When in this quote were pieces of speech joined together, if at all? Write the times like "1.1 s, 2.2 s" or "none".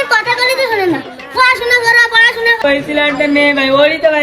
2.6 s